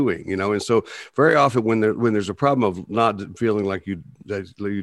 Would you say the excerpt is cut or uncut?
uncut